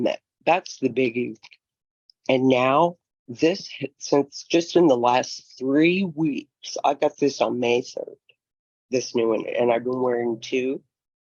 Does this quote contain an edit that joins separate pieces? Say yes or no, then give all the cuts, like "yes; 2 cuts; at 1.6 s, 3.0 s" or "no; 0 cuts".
no; 0 cuts